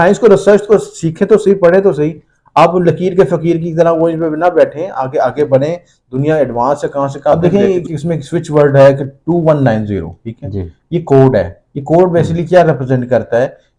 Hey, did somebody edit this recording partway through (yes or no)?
yes